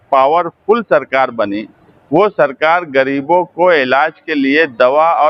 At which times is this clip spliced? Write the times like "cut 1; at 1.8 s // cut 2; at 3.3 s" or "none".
none